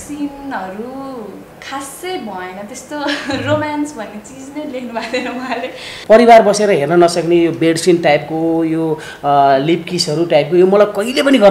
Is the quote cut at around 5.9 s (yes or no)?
yes